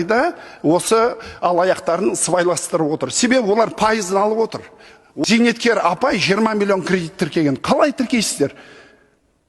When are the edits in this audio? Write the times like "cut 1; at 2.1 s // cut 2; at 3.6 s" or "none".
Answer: cut 1; at 5.3 s